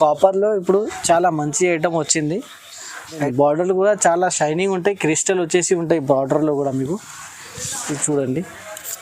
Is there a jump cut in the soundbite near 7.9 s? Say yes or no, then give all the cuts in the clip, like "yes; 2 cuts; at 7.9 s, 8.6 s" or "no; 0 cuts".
no; 1 cut; at 3.2 s